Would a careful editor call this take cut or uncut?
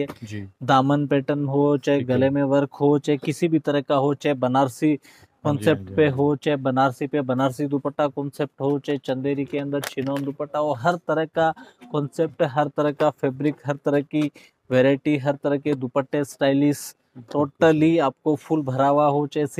uncut